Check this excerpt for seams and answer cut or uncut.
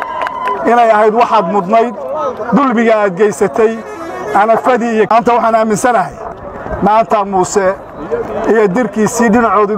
cut